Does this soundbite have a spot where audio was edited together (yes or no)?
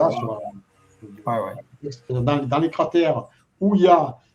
yes